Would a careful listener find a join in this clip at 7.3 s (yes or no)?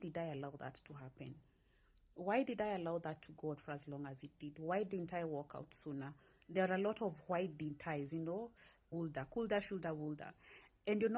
no